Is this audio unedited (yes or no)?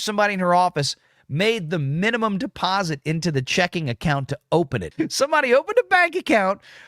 no